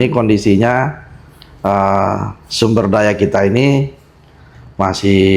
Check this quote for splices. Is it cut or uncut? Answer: uncut